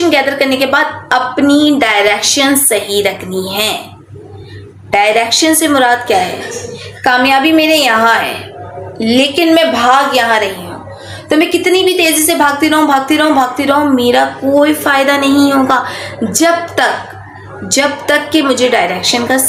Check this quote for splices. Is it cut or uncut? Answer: uncut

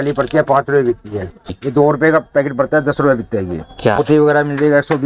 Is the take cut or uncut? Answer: cut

